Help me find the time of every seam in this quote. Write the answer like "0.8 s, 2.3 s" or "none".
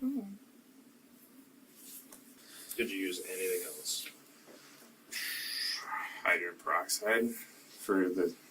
2.4 s

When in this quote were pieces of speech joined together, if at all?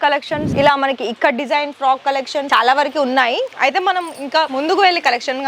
none

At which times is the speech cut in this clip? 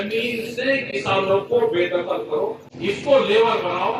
2.7 s

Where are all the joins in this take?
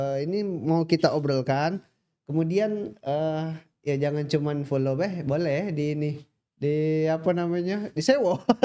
none

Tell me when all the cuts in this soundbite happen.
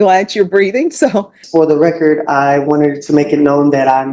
1.4 s

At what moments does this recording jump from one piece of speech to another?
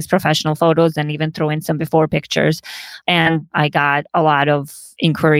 3.5 s

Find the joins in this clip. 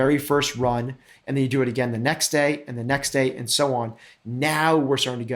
none

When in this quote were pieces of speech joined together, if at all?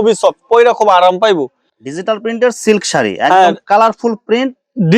1.6 s

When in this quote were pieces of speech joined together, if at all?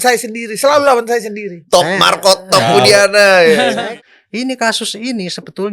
3.8 s

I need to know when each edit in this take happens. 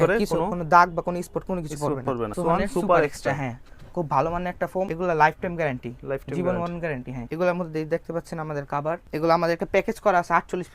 2.3 s, 4.9 s, 7.2 s, 9.0 s

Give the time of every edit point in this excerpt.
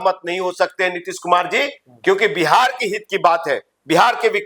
none

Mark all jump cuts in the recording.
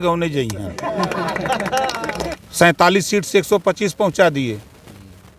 2.4 s

